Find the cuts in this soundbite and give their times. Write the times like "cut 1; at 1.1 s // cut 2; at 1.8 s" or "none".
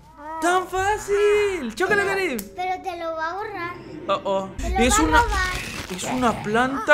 cut 1; at 4.6 s